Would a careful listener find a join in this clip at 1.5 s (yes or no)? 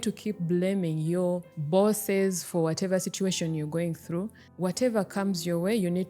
no